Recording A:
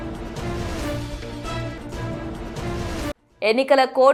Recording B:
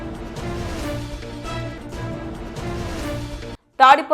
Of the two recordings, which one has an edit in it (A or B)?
B